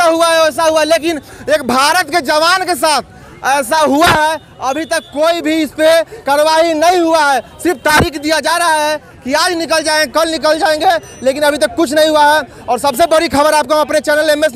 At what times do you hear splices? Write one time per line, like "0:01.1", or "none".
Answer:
none

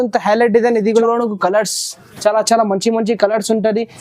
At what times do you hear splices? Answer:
0:01.0

